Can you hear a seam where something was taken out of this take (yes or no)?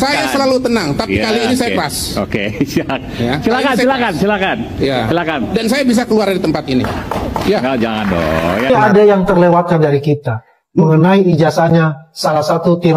yes